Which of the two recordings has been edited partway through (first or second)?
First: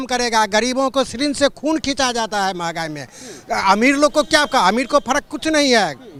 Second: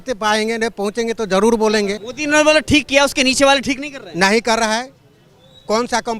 second